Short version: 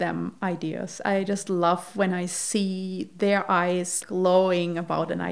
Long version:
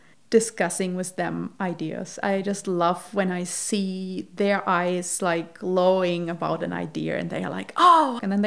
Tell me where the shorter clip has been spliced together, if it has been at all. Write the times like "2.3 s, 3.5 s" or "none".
4.0 s